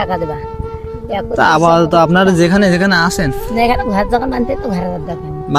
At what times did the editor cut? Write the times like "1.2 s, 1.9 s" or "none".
none

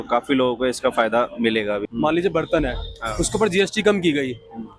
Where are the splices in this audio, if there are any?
1.9 s

